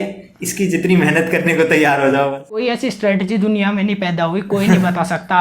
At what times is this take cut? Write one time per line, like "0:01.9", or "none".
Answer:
0:02.6